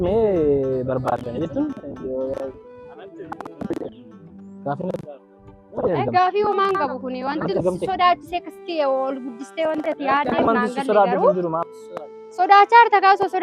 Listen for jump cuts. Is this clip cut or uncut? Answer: uncut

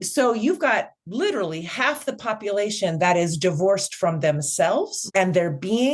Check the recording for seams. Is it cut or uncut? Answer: cut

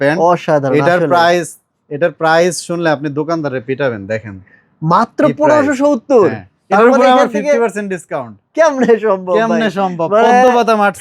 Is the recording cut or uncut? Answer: uncut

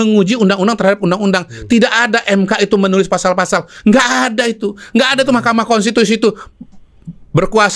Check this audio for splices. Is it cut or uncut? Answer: uncut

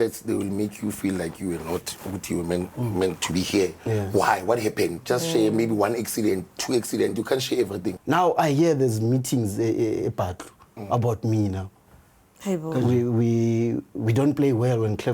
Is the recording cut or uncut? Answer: cut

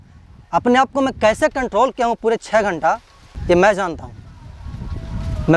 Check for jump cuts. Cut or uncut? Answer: cut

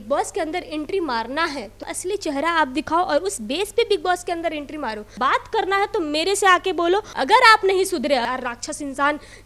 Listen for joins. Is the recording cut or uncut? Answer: cut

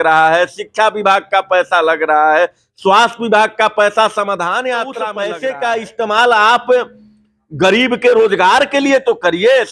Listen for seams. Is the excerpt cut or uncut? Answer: cut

